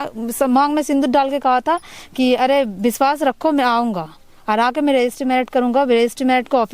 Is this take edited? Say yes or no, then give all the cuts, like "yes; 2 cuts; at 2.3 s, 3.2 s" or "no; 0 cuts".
no; 0 cuts